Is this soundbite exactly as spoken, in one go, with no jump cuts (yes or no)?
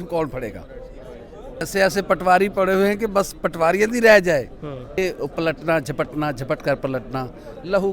no